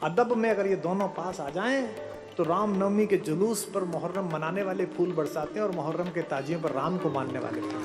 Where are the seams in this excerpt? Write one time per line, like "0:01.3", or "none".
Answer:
none